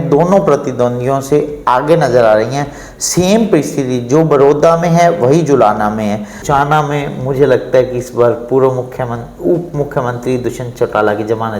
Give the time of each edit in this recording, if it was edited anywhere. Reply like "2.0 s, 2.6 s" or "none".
6.4 s